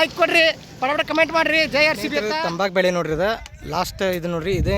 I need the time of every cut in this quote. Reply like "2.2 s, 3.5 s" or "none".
2.3 s